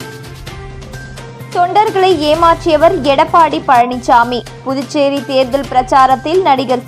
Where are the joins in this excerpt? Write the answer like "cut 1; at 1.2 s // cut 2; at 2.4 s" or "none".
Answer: cut 1; at 1.4 s